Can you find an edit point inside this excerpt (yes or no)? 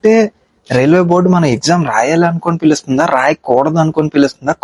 no